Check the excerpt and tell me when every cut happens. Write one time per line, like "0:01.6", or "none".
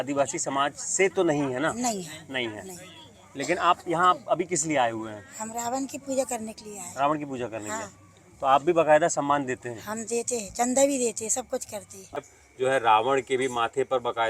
0:12.2